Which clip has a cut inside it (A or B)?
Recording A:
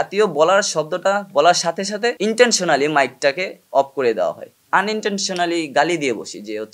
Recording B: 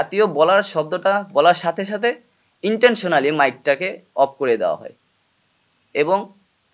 A